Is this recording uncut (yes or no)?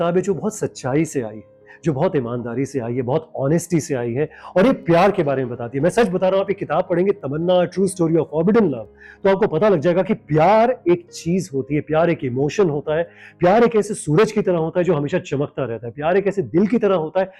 yes